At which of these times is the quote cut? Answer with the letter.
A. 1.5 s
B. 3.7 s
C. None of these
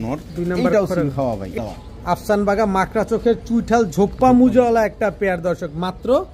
A